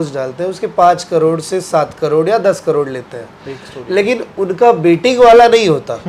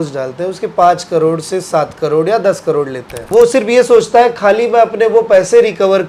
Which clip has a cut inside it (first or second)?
second